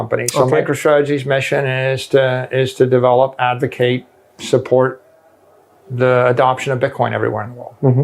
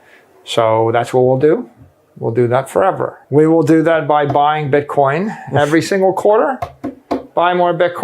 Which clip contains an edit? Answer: second; 1 cut; at 3.1 s

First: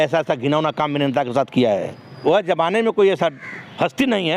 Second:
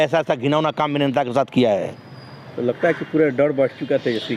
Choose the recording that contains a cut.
first; 1 cut; at 2.2 s

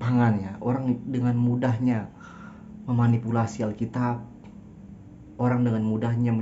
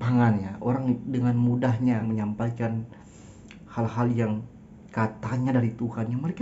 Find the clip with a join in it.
second; 1 cut; at 2.0 s

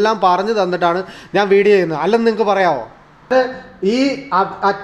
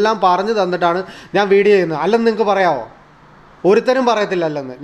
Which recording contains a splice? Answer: first; 1 cut; at 3.3 s

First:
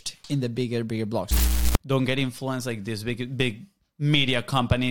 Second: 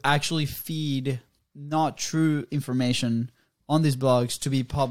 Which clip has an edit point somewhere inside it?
first; 1 cut; at 1.4 s

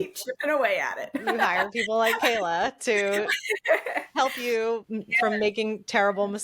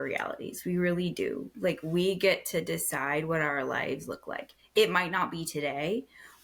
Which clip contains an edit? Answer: first; 1 cut; at 4.9 s

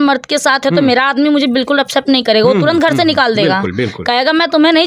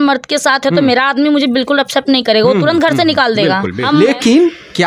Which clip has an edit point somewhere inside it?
second; 1 cut; at 3.9 s

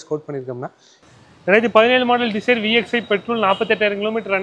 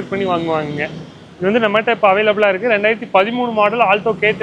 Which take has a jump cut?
first; 1 cut; at 1.0 s

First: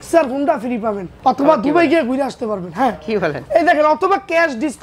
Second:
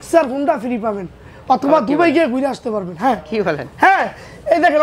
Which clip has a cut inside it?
first; 2 cuts; at 1.1 s, 3.4 s

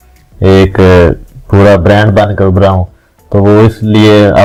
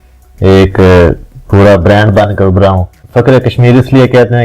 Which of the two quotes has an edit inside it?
second; 1 cut; at 2.9 s

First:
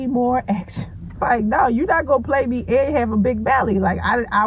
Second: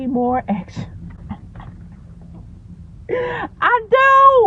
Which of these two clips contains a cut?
first; 1 cut; at 1.2 s

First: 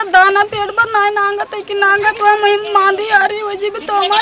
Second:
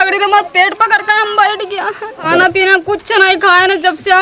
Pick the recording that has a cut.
second; 1 cut; at 2.3 s

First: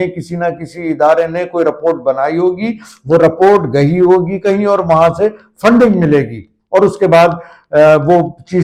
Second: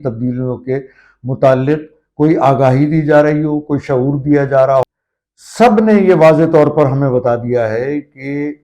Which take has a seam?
second; 1 cut; at 4.8 s

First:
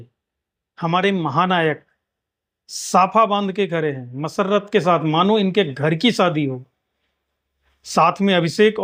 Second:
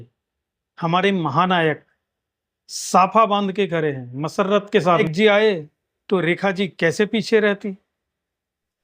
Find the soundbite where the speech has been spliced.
second; 1 cut; at 5.0 s

